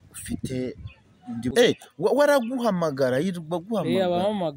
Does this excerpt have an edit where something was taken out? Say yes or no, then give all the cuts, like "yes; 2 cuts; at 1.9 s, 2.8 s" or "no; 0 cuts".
yes; 1 cut; at 1.5 s